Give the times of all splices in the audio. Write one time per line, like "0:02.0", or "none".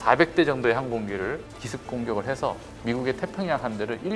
0:01.4